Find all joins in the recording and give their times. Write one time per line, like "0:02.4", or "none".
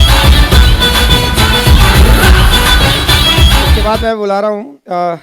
0:03.7